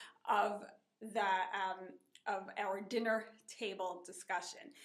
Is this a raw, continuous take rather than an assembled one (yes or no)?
yes